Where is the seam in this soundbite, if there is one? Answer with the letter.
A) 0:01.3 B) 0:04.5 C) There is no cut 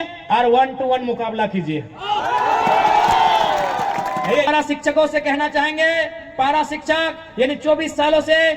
B